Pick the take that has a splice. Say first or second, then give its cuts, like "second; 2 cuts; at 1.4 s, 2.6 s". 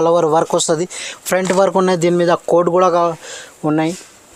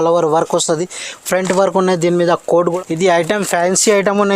second; 1 cut; at 2.8 s